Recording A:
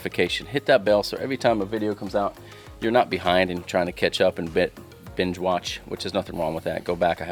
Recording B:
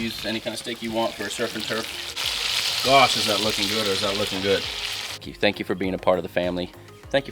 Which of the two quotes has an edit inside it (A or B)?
B